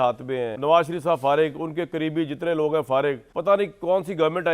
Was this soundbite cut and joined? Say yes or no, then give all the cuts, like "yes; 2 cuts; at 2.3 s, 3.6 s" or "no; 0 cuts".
yes; 1 cut; at 3.2 s